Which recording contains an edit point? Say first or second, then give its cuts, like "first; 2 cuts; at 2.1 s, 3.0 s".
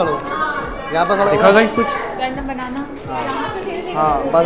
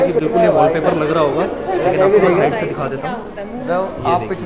second; 1 cut; at 2.5 s